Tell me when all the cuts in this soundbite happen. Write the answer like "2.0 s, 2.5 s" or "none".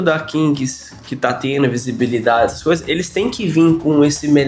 none